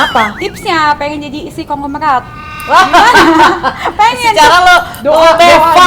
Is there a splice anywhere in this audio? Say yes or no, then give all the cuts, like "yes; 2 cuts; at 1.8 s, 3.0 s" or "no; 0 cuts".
no; 0 cuts